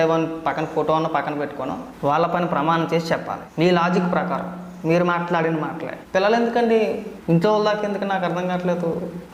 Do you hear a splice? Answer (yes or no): yes